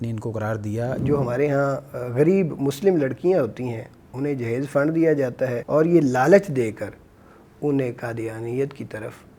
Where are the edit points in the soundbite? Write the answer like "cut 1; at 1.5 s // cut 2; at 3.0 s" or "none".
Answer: cut 1; at 1.0 s // cut 2; at 5.6 s